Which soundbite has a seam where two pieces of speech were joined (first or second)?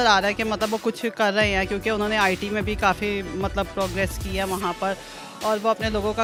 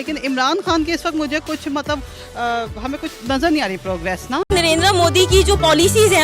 second